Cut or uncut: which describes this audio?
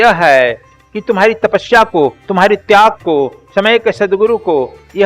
uncut